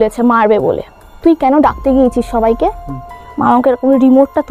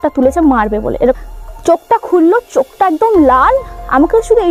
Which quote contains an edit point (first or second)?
second